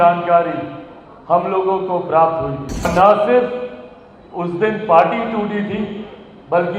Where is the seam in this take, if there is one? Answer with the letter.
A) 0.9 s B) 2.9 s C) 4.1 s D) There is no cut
B